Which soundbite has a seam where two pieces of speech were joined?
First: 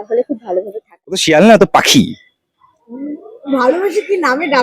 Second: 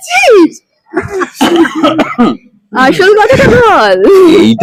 first; 1 cut; at 1.2 s

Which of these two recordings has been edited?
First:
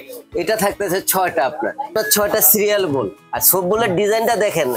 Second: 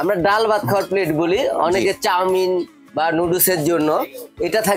first; 2 cuts; at 1.9 s, 3.2 s

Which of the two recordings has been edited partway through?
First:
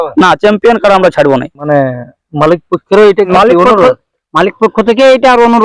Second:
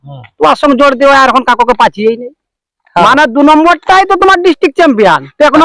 first; 2 cuts; at 1.8 s, 3.3 s

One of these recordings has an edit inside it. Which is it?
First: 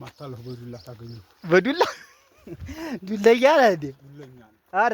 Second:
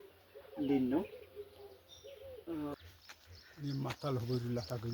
second; 1 cut; at 2.8 s

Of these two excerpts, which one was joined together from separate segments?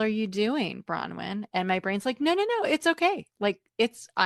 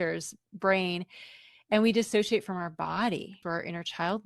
second; 1 cut; at 3.4 s

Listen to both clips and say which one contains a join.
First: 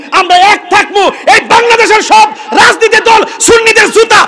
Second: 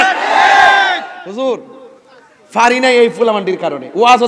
second; 1 cut; at 1.2 s

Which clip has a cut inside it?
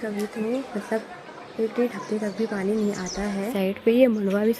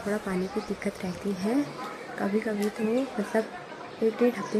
first; 1 cut; at 3.5 s

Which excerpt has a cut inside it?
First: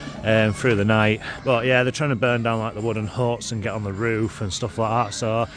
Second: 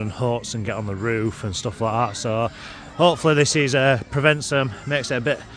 first; 1 cut; at 1.3 s

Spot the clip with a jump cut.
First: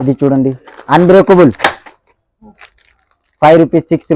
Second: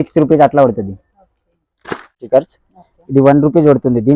second; 1 cut; at 2.2 s

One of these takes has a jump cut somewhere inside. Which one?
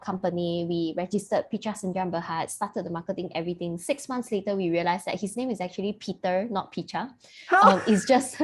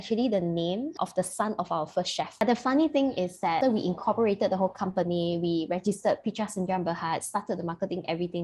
second; 3 cuts; at 0.9 s, 2.4 s, 3.6 s

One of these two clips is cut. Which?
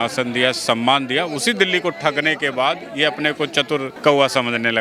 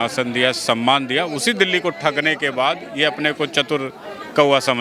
first; 1 cut; at 3.9 s

